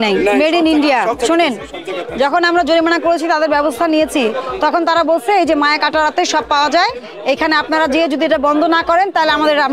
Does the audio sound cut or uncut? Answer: uncut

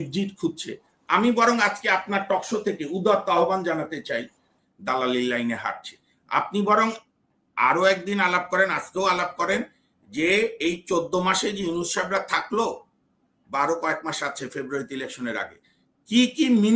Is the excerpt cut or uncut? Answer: cut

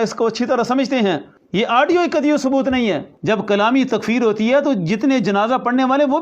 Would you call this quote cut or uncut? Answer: cut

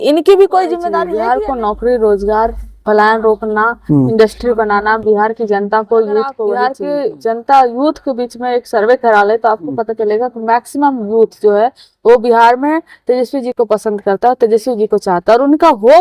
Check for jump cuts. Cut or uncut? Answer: cut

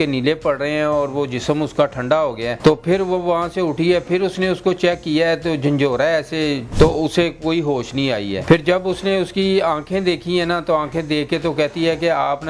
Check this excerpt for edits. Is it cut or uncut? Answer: cut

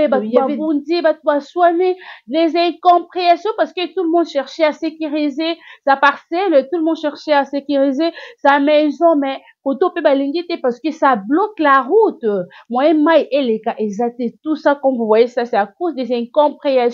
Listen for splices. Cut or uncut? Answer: uncut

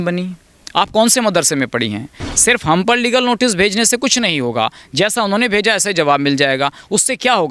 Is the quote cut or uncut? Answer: cut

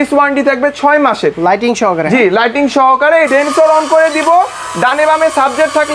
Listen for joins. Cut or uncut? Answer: cut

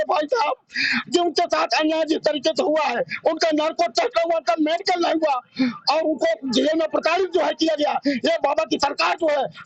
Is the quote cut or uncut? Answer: uncut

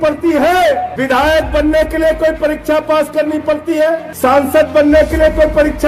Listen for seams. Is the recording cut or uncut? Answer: cut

